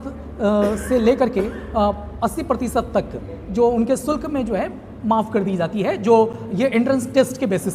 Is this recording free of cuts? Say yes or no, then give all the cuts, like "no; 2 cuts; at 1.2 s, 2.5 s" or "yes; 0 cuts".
yes; 0 cuts